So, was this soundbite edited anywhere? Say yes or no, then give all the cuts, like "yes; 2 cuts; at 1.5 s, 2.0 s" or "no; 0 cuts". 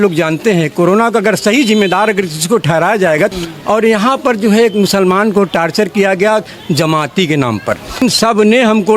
yes; 2 cuts; at 3.3 s, 8.0 s